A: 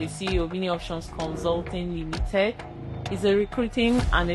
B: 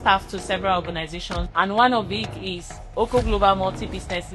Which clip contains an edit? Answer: B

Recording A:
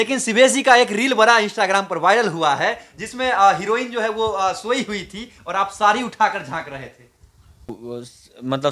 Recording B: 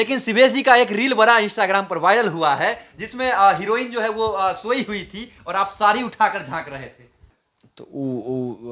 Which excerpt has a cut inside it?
A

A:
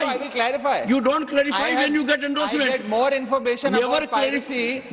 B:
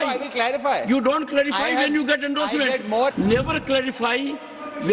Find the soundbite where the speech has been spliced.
B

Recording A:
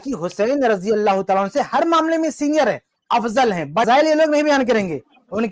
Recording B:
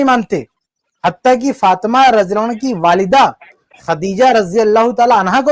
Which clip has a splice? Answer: A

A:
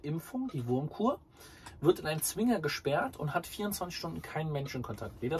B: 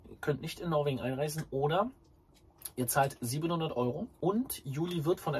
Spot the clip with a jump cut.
B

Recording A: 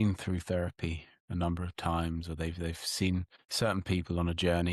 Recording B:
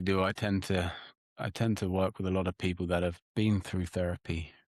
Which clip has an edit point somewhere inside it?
A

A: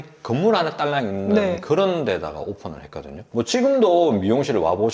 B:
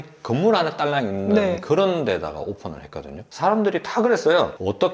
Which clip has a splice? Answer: B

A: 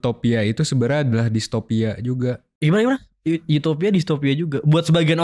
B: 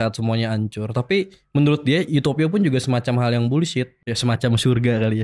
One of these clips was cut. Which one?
B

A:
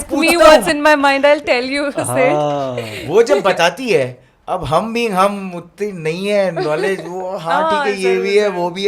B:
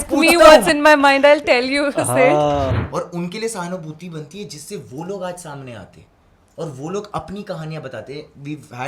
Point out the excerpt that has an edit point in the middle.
B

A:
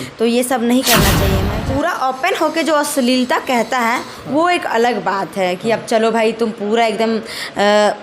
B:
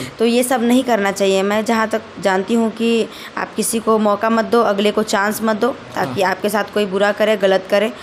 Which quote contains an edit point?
A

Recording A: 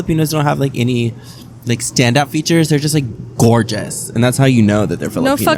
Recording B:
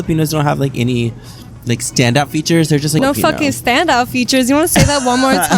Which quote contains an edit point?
B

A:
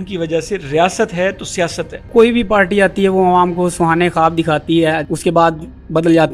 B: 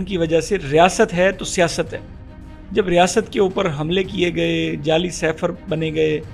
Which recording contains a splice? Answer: A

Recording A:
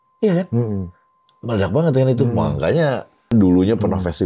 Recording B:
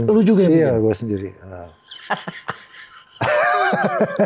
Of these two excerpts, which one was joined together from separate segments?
A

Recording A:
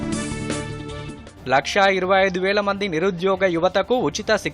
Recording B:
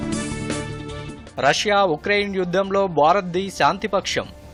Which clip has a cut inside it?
A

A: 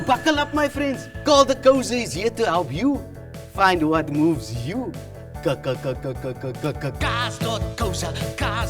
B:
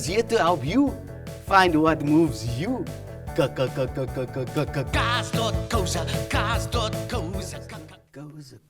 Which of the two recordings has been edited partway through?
B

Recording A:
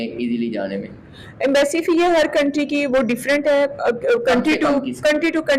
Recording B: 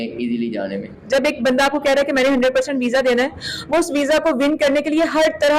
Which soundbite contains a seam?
B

